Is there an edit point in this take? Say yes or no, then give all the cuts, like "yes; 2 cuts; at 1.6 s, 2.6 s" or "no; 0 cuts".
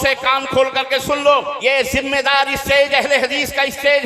yes; 1 cut; at 1.5 s